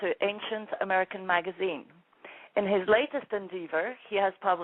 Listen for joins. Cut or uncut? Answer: cut